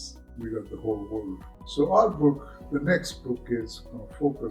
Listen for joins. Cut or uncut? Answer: cut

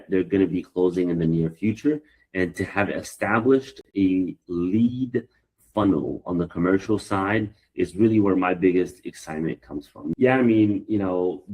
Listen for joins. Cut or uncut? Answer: cut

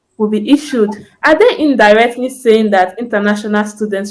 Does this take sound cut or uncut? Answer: cut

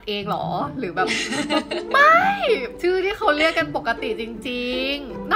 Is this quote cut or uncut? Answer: uncut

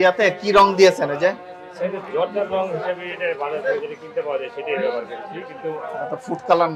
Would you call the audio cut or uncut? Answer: uncut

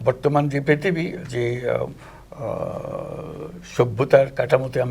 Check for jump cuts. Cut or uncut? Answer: uncut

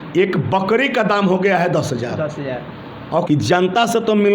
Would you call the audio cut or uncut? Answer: cut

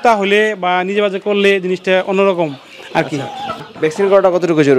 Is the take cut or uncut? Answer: cut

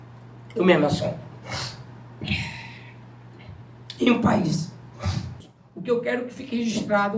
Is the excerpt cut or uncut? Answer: cut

